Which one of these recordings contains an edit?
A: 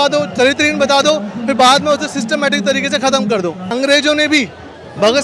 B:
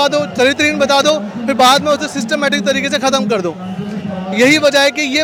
A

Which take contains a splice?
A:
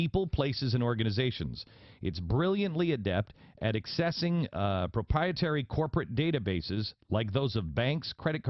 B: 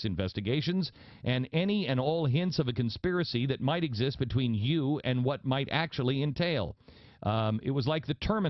A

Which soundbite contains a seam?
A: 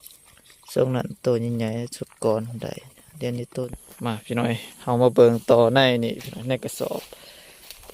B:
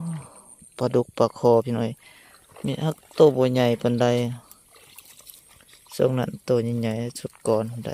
A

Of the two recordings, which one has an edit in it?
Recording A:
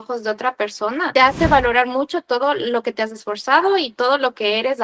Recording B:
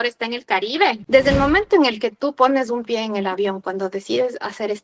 B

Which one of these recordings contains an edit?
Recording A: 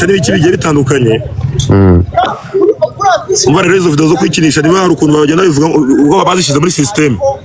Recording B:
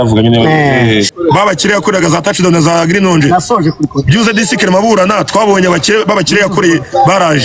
B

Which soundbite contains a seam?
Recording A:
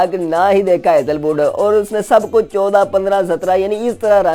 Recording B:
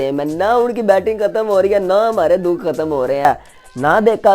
B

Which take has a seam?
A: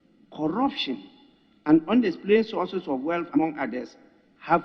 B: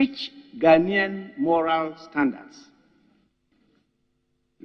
A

